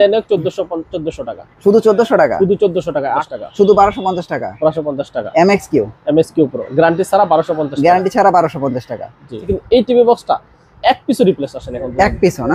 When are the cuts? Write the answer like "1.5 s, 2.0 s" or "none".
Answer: 3.2 s, 9.4 s